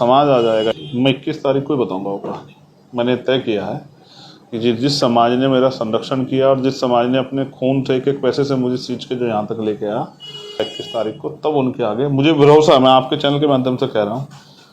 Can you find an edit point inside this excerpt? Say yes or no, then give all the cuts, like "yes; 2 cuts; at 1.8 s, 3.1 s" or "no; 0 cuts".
yes; 2 cuts; at 0.8 s, 10.7 s